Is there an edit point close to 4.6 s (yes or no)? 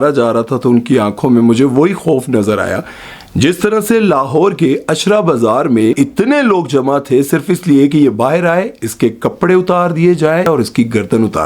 no